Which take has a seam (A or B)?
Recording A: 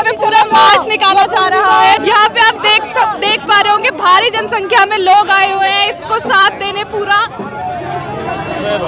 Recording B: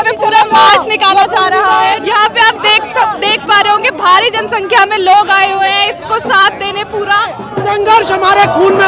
B